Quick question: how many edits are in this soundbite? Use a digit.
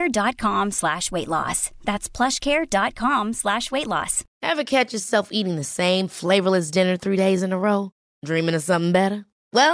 1